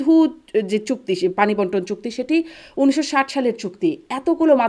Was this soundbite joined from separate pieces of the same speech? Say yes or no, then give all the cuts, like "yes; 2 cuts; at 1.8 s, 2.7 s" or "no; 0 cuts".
no; 0 cuts